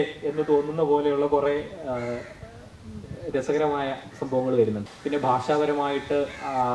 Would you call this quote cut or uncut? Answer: cut